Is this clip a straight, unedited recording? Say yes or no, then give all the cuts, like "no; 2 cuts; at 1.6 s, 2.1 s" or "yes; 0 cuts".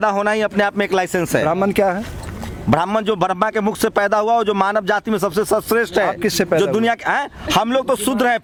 yes; 0 cuts